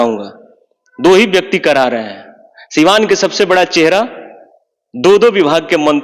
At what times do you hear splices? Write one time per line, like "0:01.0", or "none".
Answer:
none